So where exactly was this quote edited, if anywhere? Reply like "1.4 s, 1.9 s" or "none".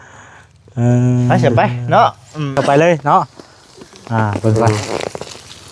2.5 s